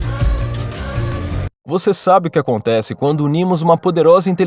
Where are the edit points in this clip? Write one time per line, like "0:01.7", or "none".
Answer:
0:01.5